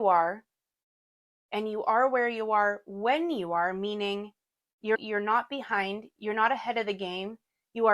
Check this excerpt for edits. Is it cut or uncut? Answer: uncut